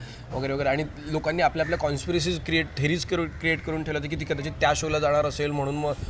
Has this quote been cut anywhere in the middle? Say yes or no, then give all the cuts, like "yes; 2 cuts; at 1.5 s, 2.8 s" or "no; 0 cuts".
no; 0 cuts